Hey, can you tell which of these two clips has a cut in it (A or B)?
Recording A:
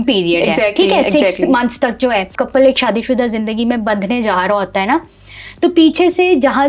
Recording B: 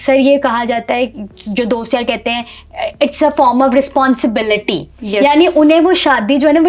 A